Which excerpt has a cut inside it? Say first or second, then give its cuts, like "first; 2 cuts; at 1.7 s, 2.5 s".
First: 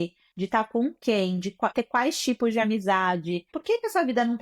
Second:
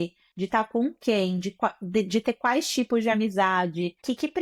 first; 2 cuts; at 1.7 s, 3.5 s